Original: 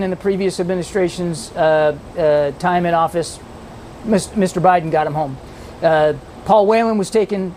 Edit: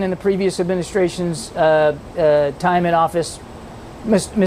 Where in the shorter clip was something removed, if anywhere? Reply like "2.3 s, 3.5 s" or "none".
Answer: none